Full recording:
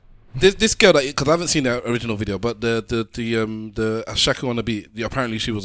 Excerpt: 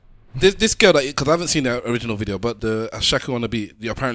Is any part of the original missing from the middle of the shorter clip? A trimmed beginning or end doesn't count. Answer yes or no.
yes